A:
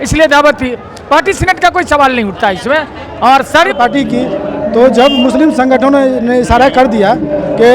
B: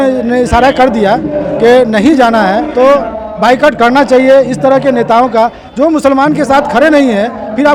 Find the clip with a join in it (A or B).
A